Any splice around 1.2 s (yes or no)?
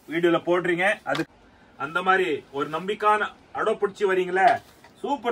yes